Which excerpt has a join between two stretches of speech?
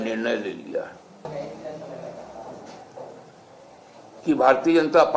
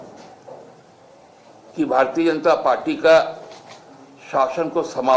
first; 1 cut; at 1.2 s

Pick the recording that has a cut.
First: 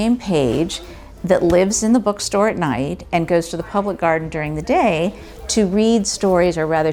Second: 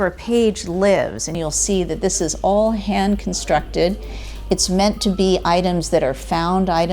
second; 1 cut; at 1.3 s

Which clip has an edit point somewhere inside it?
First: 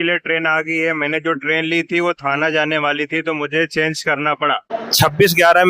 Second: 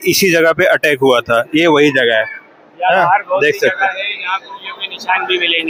first; 1 cut; at 4.7 s

